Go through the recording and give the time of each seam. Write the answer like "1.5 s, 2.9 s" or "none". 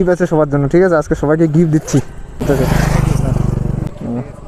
2.4 s, 3.6 s